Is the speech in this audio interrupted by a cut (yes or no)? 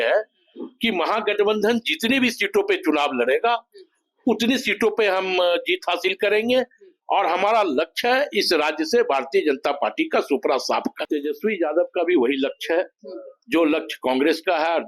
yes